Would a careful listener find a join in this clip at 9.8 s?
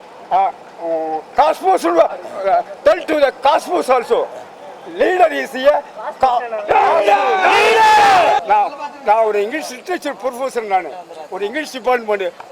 no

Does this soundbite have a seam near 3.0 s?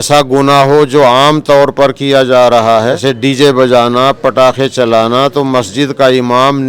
yes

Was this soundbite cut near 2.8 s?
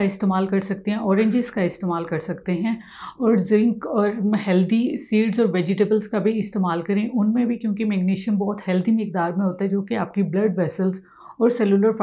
no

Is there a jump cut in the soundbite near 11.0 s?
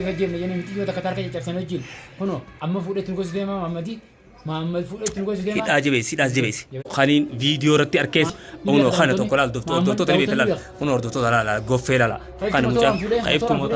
no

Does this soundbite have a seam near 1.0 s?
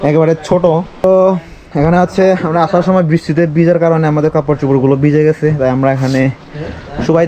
yes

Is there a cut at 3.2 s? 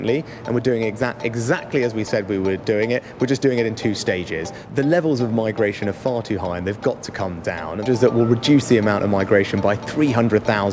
no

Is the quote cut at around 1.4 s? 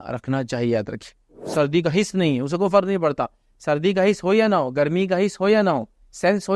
yes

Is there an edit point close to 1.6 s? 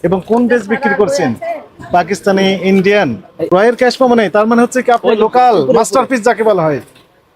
no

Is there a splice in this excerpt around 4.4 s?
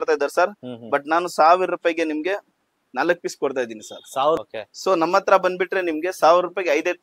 yes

